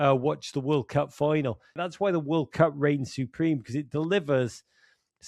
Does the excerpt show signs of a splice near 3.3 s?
no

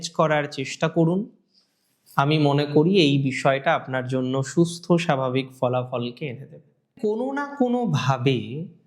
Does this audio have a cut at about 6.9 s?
yes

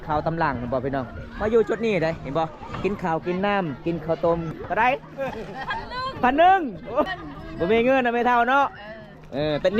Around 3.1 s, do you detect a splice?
no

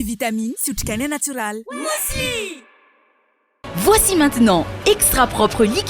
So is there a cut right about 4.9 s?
no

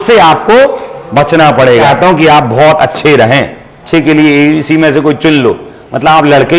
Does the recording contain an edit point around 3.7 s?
yes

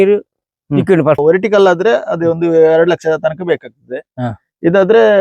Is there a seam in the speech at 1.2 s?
yes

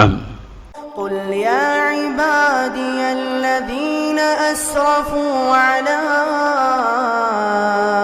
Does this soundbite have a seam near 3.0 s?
no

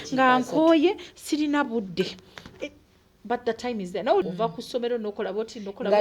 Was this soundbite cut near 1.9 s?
no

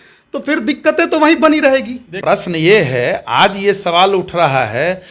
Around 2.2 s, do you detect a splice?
yes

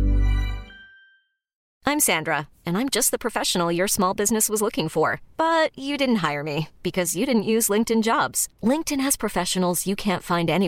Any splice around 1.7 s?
yes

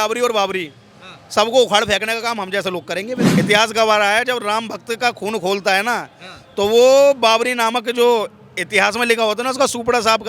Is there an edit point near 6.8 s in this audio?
no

